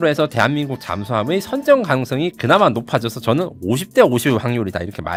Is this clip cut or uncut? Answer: uncut